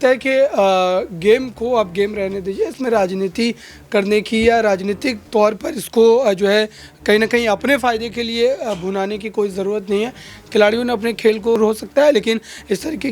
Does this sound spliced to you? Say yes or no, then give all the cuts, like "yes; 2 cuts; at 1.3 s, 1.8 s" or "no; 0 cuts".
yes; 1 cut; at 11.6 s